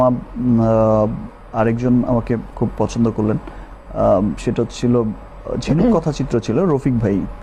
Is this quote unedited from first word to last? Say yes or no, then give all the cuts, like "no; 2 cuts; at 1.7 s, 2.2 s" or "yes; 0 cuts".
yes; 0 cuts